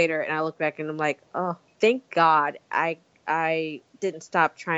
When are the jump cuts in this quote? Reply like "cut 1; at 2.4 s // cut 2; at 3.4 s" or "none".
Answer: cut 1; at 1.7 s // cut 2; at 3.8 s

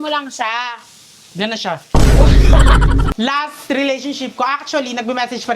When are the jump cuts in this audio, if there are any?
cut 1; at 3.1 s

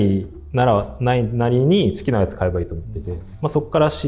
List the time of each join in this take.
none

